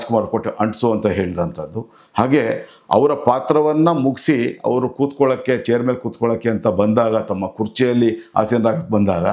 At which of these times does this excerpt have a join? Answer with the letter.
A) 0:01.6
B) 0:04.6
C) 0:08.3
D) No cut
D